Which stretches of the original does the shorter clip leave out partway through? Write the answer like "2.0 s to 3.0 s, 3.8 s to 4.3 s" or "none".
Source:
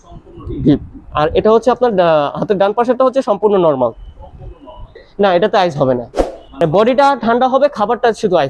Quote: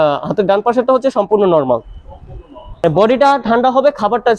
4.8 s to 6.4 s